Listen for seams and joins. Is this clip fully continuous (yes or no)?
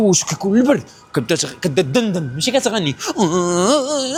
yes